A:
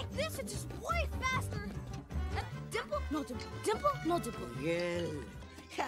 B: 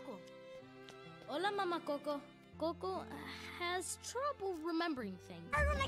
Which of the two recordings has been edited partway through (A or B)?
B